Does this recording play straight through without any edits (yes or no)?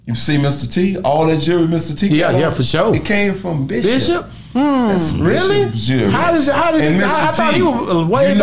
yes